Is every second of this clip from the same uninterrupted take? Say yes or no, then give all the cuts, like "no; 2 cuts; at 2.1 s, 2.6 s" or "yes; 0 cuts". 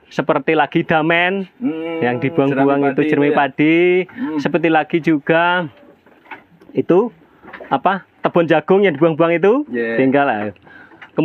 yes; 0 cuts